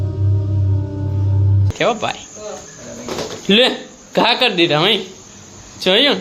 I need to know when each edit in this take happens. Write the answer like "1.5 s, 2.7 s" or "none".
1.7 s